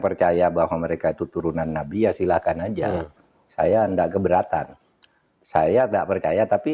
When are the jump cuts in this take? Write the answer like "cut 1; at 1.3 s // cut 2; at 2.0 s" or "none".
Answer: none